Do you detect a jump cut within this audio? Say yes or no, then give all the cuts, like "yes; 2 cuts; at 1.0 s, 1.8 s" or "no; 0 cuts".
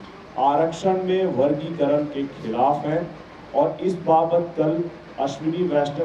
no; 0 cuts